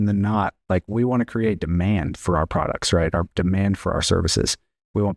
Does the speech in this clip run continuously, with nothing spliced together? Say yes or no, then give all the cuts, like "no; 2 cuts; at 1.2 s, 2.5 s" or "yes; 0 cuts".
yes; 0 cuts